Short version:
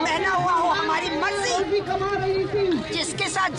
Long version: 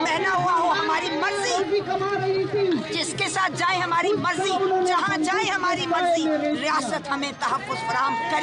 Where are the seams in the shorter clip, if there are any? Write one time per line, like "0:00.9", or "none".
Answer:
none